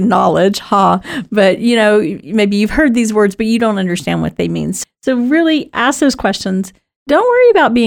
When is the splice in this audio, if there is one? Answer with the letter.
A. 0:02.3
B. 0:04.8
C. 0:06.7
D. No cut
B